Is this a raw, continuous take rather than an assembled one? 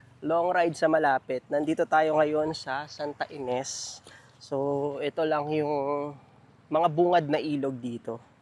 yes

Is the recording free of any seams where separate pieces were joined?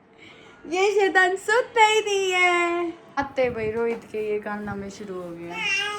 no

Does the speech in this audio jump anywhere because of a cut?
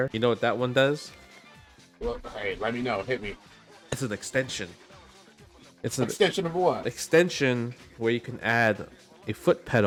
no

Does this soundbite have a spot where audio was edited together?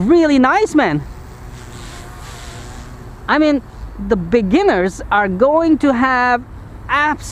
no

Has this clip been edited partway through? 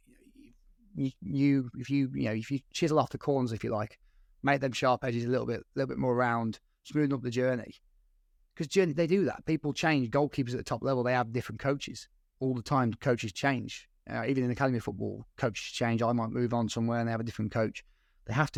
no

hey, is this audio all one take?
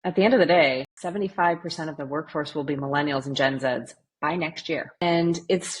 no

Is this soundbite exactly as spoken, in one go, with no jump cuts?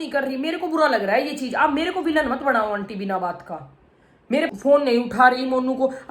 no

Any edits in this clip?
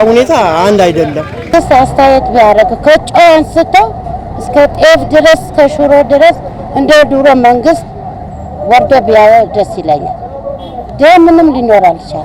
yes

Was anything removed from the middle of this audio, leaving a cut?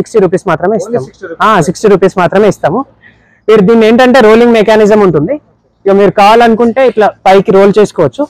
no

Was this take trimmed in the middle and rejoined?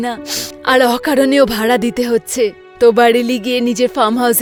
no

